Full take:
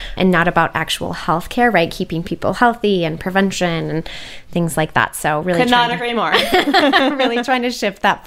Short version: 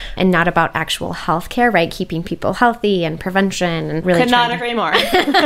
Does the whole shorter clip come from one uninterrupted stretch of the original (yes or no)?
no